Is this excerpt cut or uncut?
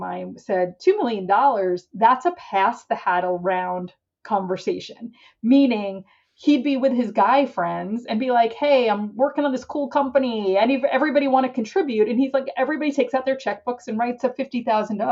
uncut